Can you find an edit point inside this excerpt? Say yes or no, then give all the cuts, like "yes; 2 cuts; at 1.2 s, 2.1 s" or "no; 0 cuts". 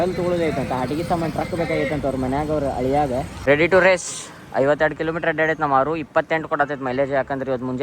yes; 1 cut; at 3.3 s